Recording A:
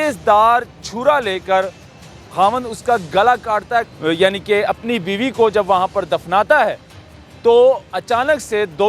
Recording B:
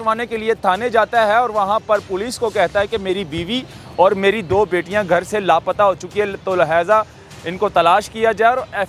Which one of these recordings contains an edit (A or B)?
A